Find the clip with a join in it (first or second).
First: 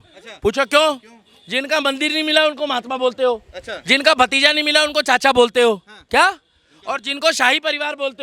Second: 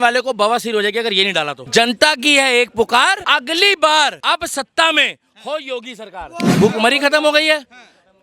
second